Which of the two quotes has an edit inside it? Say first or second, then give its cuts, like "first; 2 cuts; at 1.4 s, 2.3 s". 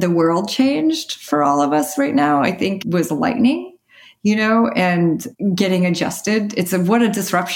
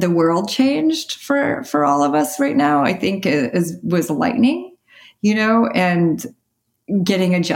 first; 3 cuts; at 1.2 s, 2.8 s, 5.3 s